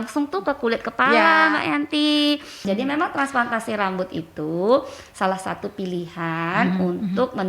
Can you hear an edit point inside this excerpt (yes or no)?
yes